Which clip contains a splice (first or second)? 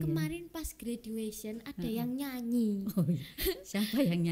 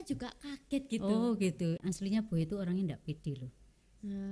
second